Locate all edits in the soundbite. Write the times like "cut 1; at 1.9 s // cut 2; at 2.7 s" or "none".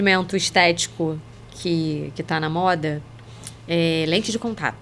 none